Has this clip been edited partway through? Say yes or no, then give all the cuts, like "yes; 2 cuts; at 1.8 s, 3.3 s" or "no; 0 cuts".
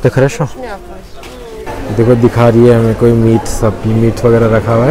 yes; 1 cut; at 1.6 s